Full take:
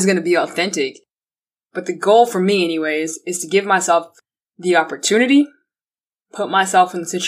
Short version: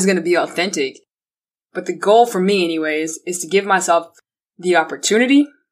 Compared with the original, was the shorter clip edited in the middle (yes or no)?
no